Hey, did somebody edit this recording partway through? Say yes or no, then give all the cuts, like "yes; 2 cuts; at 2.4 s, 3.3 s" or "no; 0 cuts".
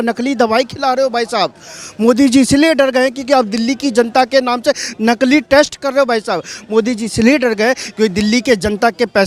no; 0 cuts